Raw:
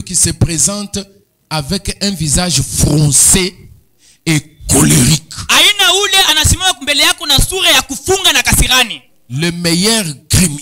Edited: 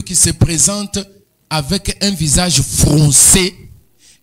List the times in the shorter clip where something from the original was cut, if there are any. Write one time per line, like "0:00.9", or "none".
none